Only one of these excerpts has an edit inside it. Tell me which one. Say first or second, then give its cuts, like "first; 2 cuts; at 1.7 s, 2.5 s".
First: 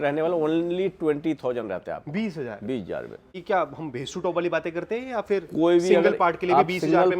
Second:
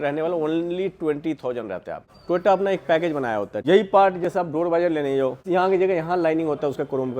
second; 3 cuts; at 2.0 s, 3.5 s, 5.4 s